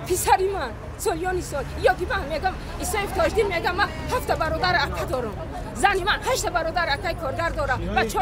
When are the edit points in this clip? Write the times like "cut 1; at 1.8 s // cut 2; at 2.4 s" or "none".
none